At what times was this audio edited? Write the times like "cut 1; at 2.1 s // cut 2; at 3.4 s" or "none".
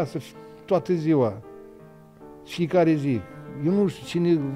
none